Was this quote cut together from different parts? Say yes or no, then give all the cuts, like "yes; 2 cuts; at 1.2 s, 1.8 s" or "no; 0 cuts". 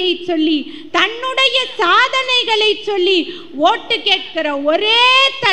no; 0 cuts